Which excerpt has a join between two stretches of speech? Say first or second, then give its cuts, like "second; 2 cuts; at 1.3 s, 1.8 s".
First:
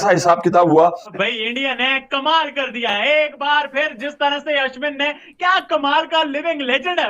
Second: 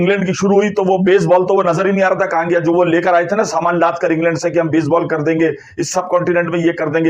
first; 1 cut; at 1.1 s